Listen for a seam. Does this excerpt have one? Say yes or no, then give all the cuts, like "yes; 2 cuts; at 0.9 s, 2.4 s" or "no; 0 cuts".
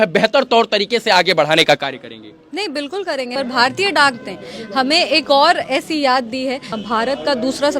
yes; 2 cuts; at 3.3 s, 6.7 s